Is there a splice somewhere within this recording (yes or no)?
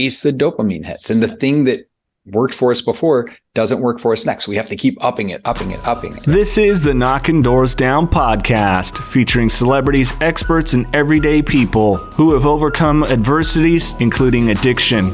yes